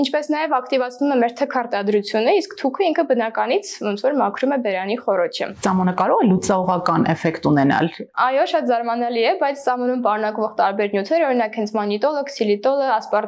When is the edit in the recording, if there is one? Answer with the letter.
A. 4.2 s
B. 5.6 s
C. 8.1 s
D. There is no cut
B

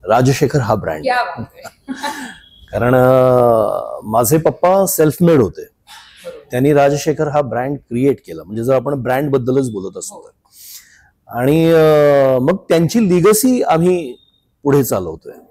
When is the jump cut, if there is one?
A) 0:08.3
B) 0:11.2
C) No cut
C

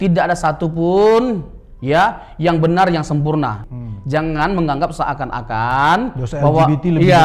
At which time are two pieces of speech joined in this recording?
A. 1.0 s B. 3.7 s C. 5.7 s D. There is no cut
B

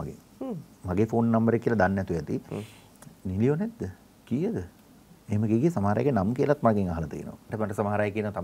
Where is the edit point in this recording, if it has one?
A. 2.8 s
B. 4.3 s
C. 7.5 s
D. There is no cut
C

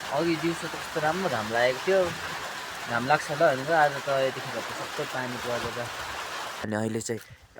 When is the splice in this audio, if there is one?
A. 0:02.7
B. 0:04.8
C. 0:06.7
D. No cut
C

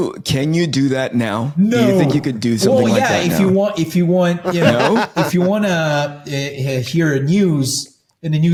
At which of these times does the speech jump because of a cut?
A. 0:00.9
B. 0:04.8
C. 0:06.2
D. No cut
D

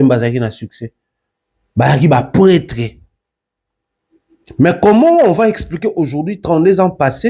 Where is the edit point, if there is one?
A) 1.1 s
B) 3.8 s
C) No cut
C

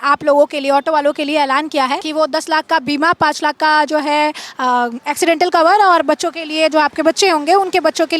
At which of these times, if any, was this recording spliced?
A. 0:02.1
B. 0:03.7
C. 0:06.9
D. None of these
A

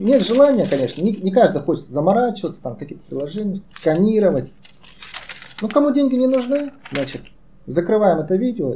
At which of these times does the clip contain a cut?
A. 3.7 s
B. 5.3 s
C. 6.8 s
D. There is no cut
A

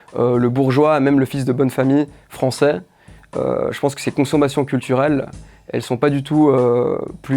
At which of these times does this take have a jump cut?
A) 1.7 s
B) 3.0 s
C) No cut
C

